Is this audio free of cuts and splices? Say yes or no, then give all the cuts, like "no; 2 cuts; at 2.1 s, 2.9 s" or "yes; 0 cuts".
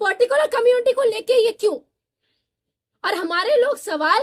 yes; 0 cuts